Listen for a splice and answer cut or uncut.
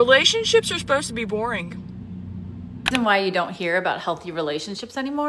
cut